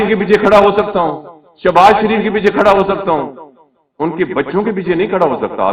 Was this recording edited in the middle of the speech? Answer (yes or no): no